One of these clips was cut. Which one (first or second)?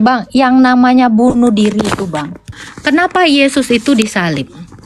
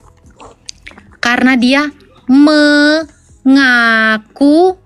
first